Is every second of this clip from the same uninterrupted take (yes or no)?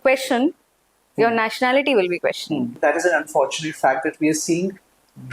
no